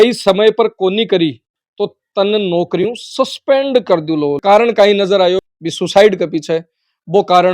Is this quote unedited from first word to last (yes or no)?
no